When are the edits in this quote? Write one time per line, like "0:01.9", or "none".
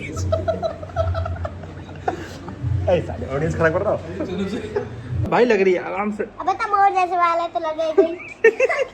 0:05.3